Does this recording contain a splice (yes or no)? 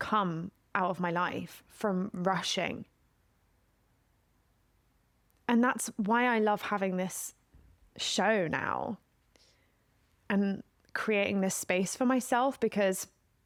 no